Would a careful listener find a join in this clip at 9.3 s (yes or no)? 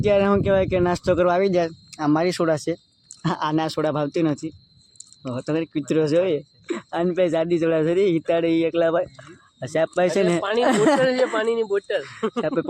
no